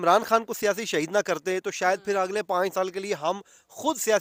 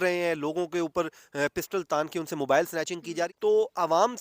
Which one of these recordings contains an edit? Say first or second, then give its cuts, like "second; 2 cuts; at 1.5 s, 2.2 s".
second; 1 cut; at 3.0 s